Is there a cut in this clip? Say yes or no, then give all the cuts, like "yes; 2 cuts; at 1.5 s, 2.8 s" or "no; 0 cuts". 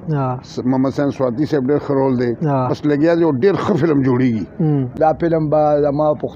yes; 1 cut; at 5.0 s